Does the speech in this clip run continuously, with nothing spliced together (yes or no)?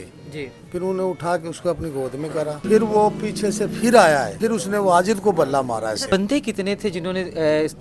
no